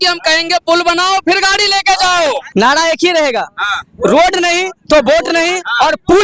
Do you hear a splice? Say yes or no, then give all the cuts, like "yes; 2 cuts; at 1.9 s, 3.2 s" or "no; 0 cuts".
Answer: yes; 1 cut; at 2.4 s